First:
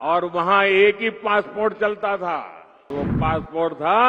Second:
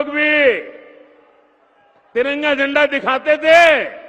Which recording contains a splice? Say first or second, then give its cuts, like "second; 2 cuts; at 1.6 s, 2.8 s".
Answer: first; 1 cut; at 2.9 s